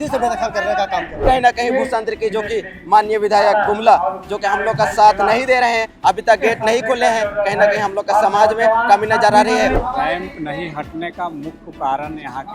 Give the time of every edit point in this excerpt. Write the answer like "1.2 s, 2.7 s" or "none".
1.1 s, 9.8 s